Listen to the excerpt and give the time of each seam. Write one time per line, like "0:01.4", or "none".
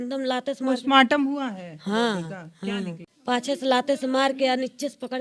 0:03.1